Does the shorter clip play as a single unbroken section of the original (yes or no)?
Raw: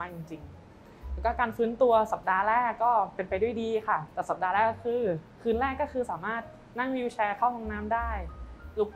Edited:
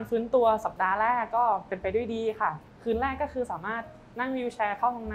no